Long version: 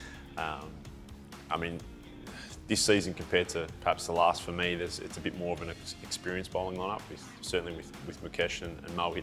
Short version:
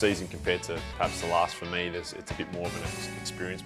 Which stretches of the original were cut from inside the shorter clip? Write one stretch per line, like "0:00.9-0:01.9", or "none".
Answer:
none